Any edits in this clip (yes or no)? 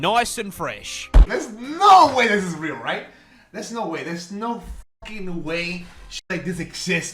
yes